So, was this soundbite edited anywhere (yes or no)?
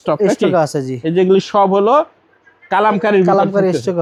no